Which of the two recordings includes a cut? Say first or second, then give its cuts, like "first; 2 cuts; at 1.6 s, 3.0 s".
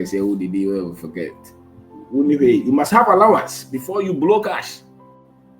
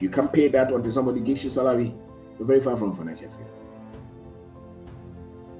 first; 1 cut; at 4.7 s